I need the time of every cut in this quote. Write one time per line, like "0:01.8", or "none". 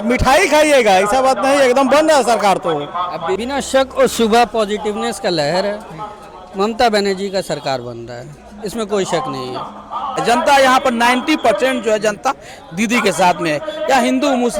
0:03.4
0:10.2